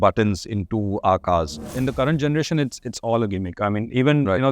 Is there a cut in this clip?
yes; 1 cut; at 1.8 s

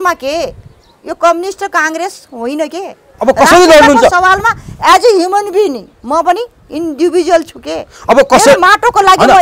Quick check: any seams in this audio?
no; 0 cuts

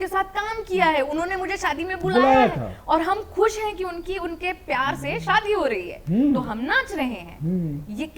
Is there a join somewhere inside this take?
no; 0 cuts

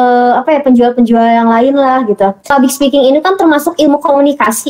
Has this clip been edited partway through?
yes; 1 cut; at 2.4 s

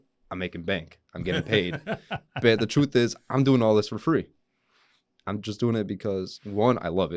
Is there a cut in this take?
no; 0 cuts

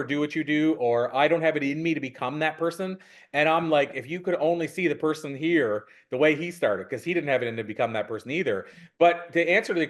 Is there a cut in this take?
no; 0 cuts

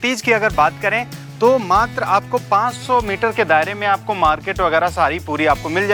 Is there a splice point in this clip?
no; 0 cuts

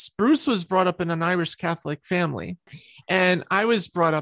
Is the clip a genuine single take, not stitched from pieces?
no; 1 cut; at 2.7 s

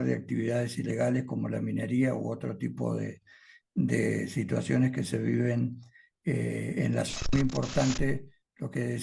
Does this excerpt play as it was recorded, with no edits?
no; 1 cut; at 7.3 s

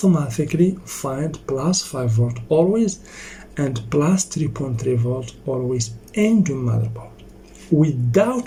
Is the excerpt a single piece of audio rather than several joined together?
yes; 0 cuts

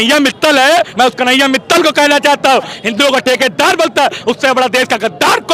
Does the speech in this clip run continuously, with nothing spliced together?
no; 2 cuts; at 0.9 s, 2.7 s

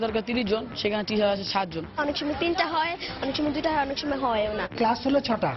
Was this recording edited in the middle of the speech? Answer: yes; 1 cut; at 1.9 s

